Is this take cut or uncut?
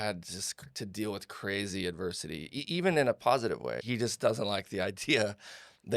cut